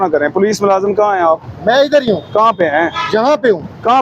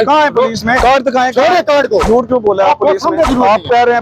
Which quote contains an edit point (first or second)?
second